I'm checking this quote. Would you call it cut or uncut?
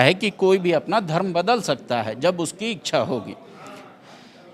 uncut